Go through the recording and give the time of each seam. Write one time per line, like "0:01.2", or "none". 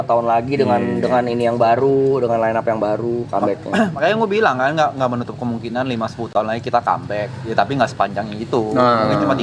none